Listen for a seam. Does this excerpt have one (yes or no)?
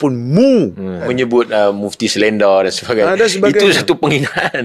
yes